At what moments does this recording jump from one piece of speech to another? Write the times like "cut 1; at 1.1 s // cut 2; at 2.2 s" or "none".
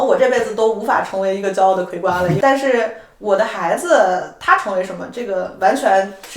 cut 1; at 2.4 s

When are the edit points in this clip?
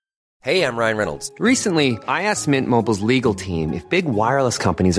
none

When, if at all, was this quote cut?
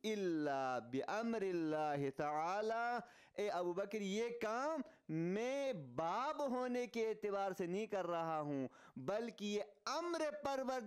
none

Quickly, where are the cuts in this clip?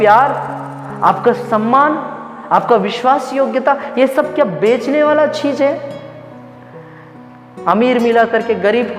none

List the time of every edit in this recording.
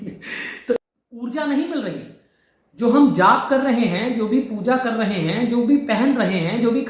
cut 1; at 0.9 s

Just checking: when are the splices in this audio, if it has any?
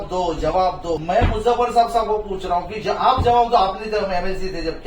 cut 1; at 1.0 s

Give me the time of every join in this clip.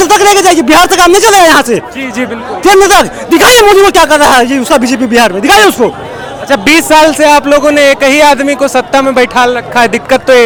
none

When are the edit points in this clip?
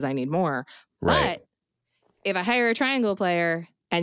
none

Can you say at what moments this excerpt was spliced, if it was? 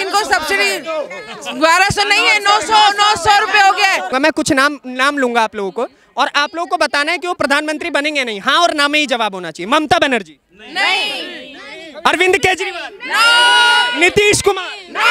cut 1; at 4.1 s

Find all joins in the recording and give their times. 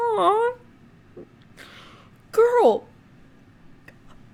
none

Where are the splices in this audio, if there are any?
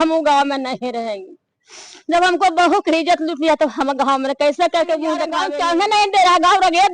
cut 1; at 5.3 s

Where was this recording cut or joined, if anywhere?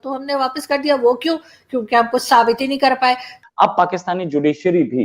cut 1; at 3.4 s

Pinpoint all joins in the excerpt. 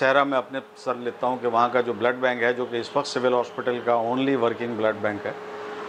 none

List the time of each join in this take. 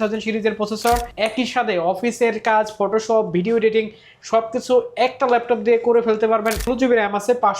cut 1; at 1.1 s // cut 2; at 6.7 s

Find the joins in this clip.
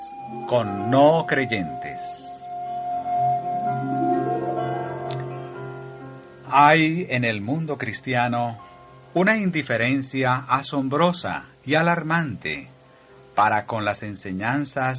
cut 1; at 7.7 s

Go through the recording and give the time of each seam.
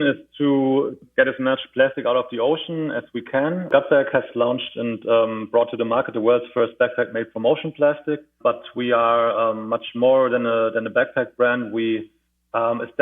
cut 1; at 1.0 s // cut 2; at 3.7 s // cut 3; at 8.3 s

